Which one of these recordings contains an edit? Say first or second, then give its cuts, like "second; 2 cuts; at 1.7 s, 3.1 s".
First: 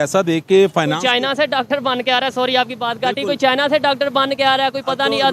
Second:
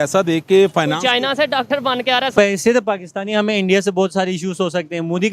second; 1 cut; at 2.3 s